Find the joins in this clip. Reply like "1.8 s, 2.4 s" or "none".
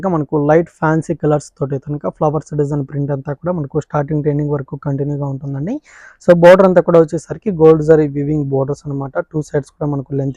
none